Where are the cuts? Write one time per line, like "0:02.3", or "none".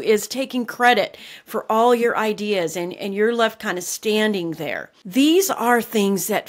none